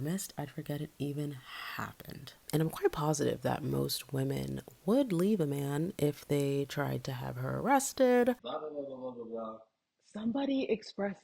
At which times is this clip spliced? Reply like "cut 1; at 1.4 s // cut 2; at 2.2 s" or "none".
cut 1; at 2.4 s // cut 2; at 8.4 s